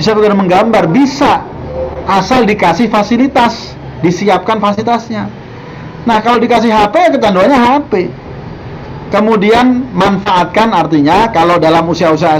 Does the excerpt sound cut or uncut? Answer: uncut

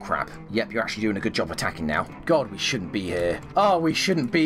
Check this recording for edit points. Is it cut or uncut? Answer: uncut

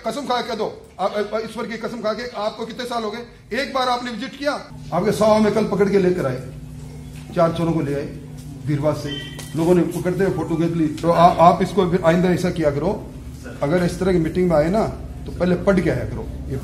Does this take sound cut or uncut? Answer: cut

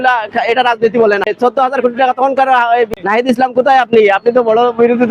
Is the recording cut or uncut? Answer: cut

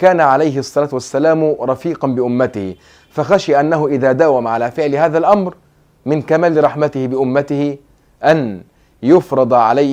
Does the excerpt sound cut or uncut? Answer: uncut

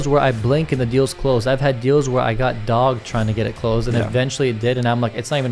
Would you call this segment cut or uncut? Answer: uncut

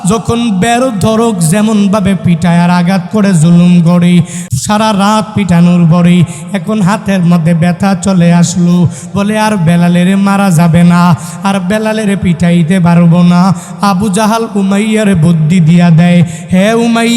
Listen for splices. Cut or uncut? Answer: cut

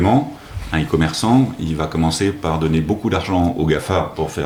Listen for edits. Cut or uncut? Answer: uncut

